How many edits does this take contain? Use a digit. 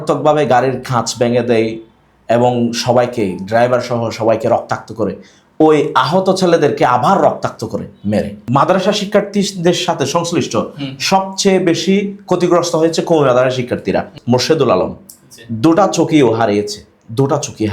2